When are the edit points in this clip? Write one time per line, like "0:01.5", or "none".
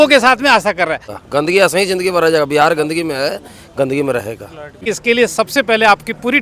0:01.2
0:04.8

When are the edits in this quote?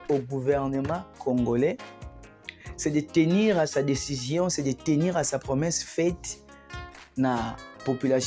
none

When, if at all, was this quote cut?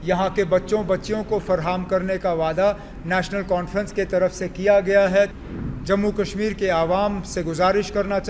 0:05.3

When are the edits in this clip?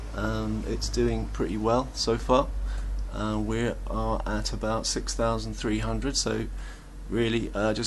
0:02.0

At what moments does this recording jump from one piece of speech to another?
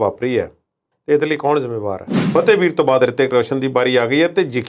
0:02.1

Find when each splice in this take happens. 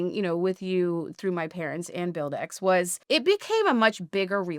0:03.0

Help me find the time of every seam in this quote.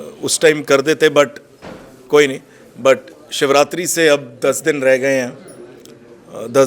none

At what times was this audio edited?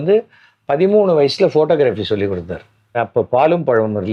0:03.0

